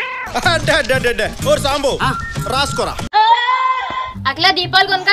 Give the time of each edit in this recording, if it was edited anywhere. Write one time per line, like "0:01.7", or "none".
0:04.2